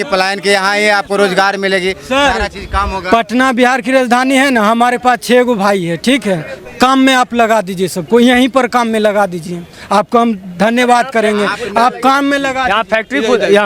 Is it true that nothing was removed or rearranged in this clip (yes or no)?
yes